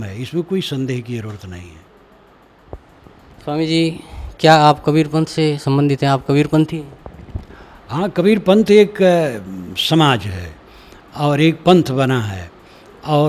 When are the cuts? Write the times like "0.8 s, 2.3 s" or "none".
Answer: 2.6 s